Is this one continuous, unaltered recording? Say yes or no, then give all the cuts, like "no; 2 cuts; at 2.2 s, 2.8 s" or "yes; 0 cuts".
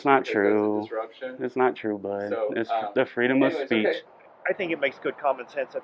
no; 1 cut; at 4.1 s